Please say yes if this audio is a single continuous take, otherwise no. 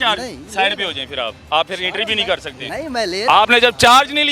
yes